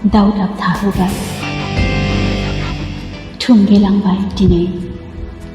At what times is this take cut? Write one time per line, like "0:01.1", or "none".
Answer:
0:01.3
0:02.8